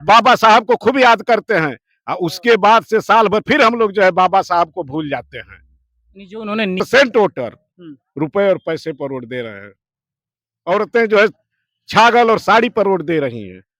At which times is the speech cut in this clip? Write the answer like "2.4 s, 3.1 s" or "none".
6.8 s